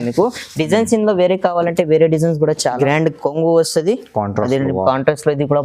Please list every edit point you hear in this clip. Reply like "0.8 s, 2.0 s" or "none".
2.8 s